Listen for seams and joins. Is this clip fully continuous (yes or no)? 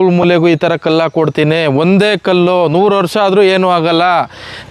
yes